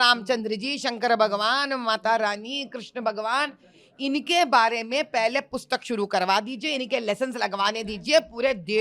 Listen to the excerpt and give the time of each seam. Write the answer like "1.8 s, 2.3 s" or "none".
none